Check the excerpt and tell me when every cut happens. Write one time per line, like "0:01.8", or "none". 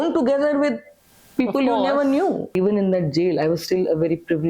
0:02.5

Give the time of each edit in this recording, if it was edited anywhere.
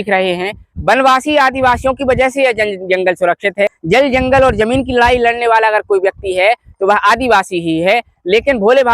0:03.8

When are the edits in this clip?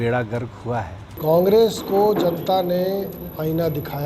0:01.0

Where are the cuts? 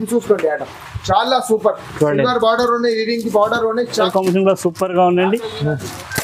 0:03.9

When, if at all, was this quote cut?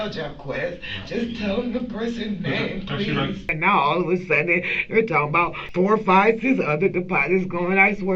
0:03.5
0:05.6

